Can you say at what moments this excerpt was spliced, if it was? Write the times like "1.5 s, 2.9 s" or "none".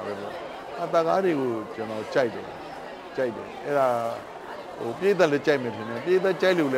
none